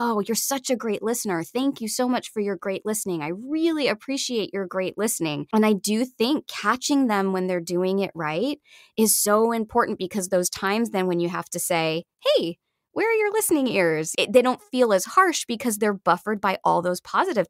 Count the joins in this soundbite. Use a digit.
2